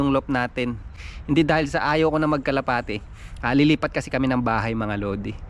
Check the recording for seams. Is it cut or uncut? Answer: uncut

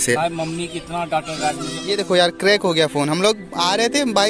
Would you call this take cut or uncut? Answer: cut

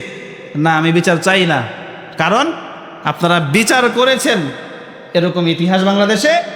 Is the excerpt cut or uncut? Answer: uncut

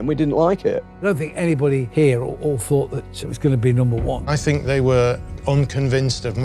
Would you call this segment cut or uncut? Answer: cut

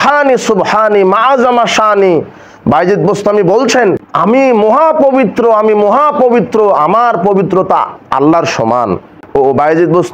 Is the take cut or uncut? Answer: cut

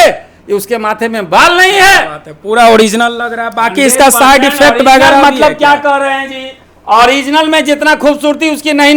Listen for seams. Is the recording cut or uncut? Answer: uncut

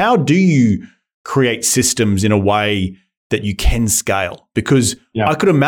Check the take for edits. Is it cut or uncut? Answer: uncut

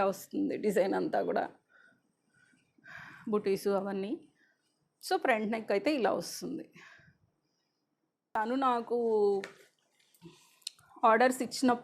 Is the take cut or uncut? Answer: cut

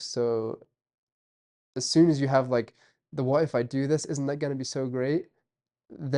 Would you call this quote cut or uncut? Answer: uncut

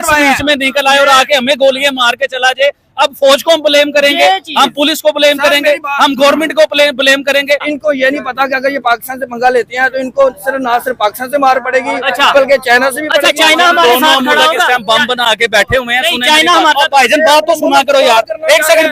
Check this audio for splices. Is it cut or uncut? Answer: cut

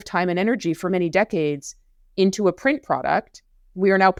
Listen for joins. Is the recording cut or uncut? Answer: uncut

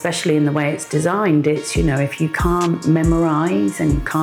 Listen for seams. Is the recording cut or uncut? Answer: uncut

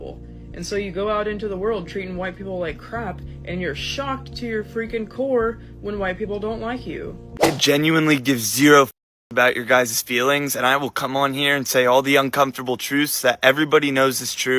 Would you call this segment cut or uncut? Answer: cut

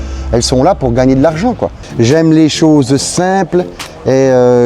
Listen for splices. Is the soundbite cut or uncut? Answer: cut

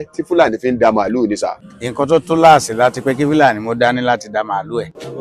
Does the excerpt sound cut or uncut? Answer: cut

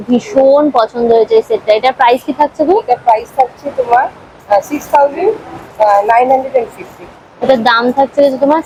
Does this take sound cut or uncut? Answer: uncut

